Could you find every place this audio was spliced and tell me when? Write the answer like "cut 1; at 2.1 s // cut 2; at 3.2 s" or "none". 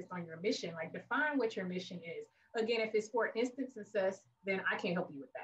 cut 1; at 4.3 s